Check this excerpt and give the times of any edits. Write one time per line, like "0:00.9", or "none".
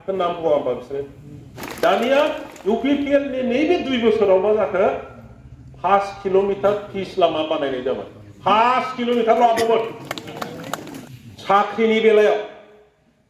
0:01.6
0:11.0